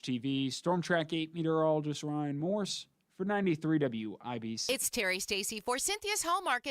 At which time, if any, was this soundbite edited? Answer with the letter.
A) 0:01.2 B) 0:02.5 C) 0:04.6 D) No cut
C